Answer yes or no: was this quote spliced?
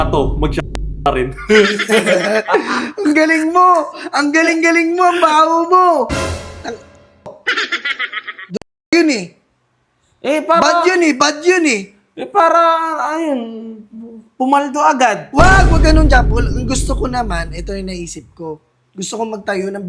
no